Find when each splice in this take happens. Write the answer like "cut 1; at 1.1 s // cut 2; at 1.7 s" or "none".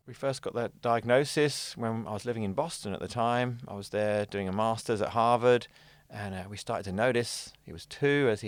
none